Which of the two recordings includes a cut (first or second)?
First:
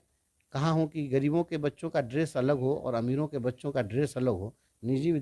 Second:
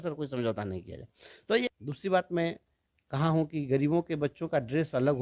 second